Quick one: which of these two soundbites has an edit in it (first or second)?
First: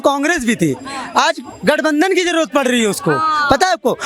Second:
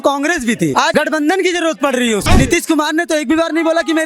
second